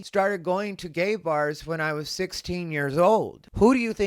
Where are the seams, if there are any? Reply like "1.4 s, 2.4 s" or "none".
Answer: none